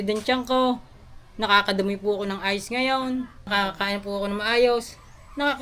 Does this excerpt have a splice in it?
yes; 1 cut; at 3.4 s

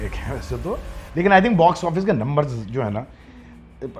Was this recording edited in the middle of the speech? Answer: no; 0 cuts

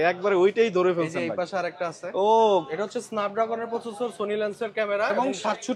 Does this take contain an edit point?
yes; 1 cut; at 2.7 s

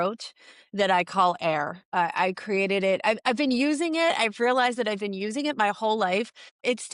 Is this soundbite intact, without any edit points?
yes; 0 cuts

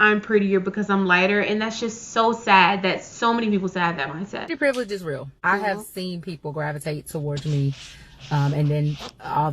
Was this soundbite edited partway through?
yes; 2 cuts; at 4.4 s, 5.3 s

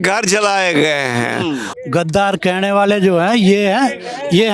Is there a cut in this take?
yes; 1 cut; at 1.7 s

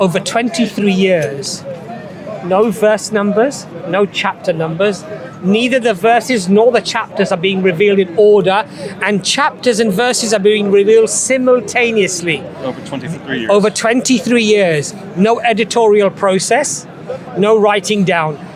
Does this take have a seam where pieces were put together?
no; 0 cuts

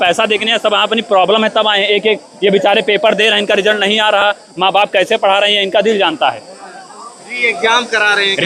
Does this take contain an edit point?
no; 0 cuts

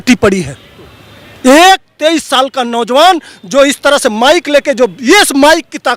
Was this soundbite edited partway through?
no; 0 cuts

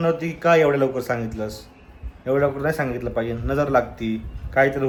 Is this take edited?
no; 0 cuts

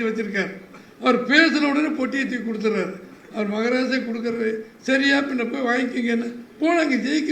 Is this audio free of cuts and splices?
yes; 0 cuts

